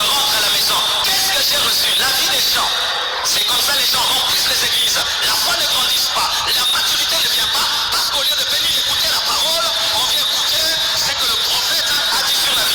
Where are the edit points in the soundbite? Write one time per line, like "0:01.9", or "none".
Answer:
none